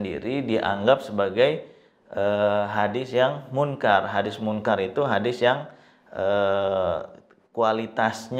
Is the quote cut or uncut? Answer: uncut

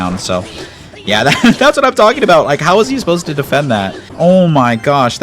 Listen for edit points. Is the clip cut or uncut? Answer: cut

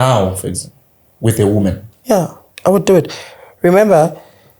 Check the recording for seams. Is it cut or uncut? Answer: cut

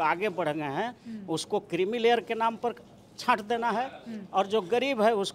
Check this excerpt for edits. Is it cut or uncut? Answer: uncut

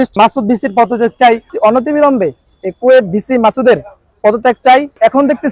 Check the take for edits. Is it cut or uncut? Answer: cut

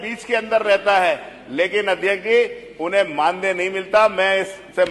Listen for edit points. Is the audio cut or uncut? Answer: uncut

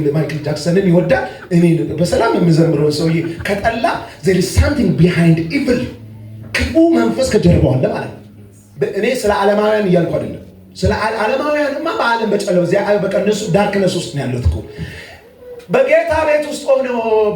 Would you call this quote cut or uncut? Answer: cut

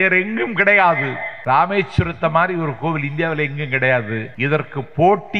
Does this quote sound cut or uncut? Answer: cut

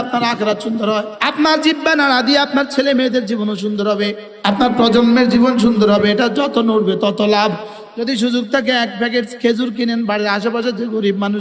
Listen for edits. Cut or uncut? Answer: cut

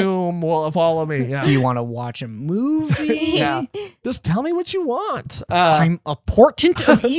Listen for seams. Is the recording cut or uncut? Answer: uncut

